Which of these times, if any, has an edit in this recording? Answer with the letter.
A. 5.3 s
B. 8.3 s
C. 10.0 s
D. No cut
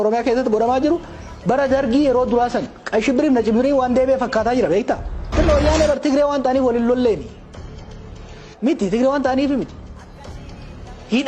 A